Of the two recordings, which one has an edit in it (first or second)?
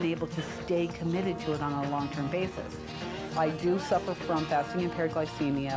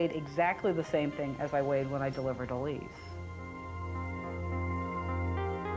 second